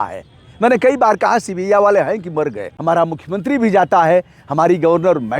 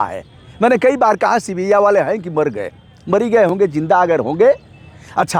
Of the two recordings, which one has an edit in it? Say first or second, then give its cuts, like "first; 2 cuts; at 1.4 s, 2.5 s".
first; 1 cut; at 2.7 s